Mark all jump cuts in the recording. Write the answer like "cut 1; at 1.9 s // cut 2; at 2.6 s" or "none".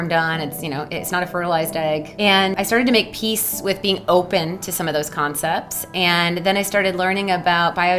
cut 1; at 2.4 s